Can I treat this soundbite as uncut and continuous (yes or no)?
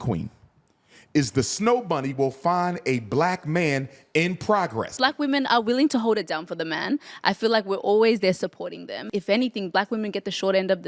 no